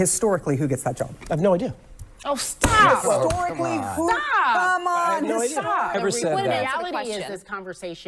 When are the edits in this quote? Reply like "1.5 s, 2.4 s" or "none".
5.9 s